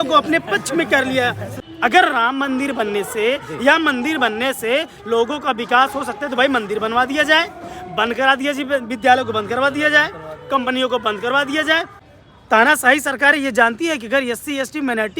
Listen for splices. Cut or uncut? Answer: cut